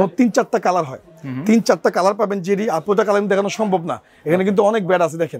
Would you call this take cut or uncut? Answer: uncut